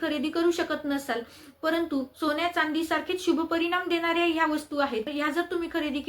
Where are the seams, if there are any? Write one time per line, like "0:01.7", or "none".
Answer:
0:05.1